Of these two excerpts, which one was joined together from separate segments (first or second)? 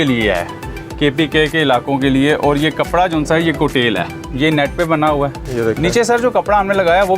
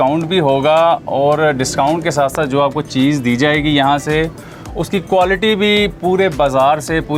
first